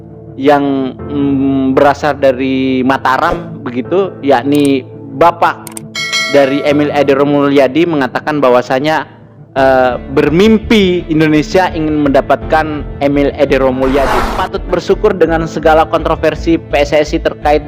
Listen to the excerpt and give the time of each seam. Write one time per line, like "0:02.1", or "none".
0:14.3

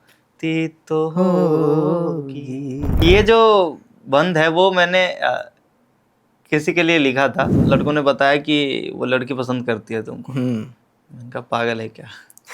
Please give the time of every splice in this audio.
0:03.0
0:07.6

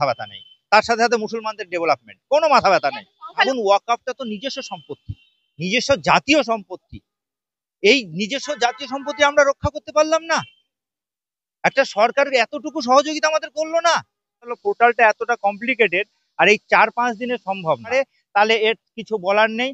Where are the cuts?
0:03.4
0:14.5
0:17.9

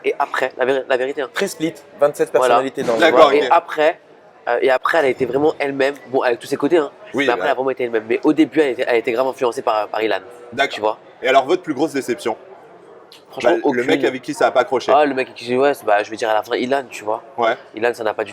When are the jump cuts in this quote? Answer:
none

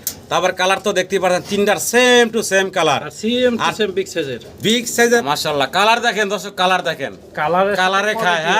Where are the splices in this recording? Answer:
0:05.2

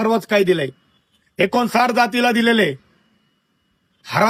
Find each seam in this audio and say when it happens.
none

